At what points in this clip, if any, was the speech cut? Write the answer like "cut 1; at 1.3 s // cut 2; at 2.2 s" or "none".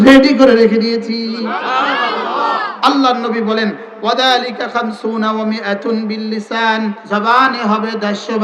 cut 1; at 2.6 s // cut 2; at 7.0 s